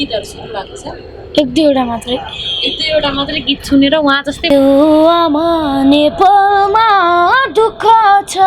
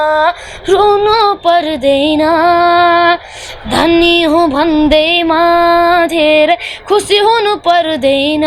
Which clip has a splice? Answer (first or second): first